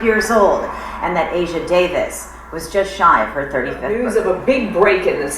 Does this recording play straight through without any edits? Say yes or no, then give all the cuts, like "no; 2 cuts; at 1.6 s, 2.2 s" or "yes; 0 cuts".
no; 1 cut; at 3.9 s